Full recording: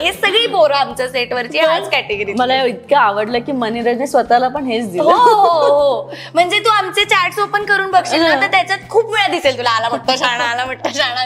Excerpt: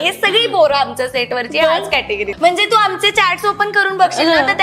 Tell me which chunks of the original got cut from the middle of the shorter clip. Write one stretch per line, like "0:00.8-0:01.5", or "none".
0:02.3-0:06.2